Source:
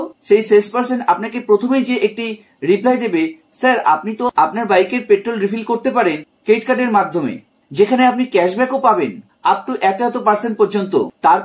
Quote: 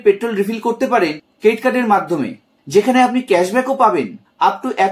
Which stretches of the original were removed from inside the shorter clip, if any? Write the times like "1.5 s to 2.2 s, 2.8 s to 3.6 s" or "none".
none